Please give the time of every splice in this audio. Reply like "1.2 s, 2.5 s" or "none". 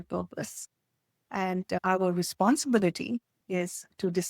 1.8 s